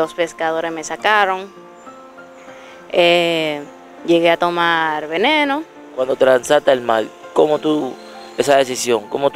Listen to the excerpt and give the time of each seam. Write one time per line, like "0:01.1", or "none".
none